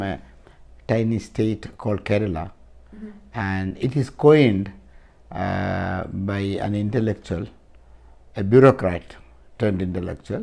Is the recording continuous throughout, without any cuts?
yes; 0 cuts

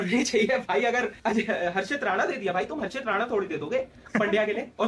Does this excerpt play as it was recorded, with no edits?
yes; 0 cuts

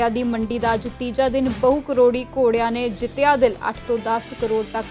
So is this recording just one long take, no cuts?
yes; 0 cuts

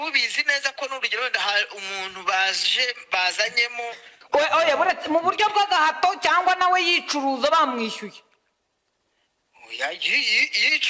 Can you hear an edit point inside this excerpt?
yes; 1 cut; at 4.1 s

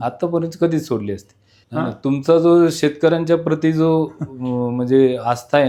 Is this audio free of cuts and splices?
yes; 0 cuts

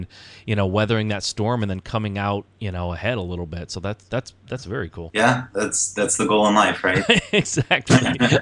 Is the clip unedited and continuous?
no; 1 cut; at 5.0 s

